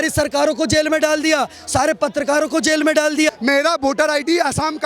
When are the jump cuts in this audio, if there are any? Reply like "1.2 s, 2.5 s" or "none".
3.4 s